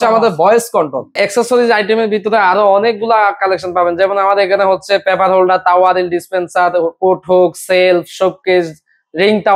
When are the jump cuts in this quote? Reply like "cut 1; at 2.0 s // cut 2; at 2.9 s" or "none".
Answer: cut 1; at 1.1 s